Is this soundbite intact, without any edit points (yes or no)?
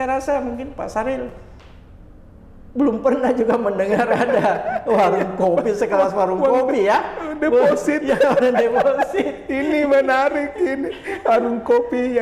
yes